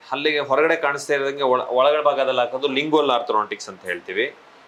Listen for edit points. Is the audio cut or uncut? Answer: uncut